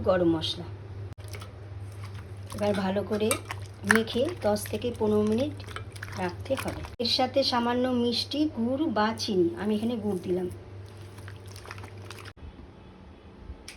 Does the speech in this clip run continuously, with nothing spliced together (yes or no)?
no